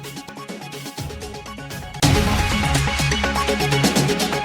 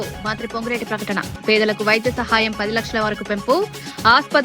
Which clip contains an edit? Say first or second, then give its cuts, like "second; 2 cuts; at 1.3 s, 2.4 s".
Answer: first; 2 cuts; at 2.0 s, 3.5 s